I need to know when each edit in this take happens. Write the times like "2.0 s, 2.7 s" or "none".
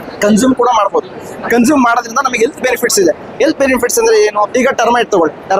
none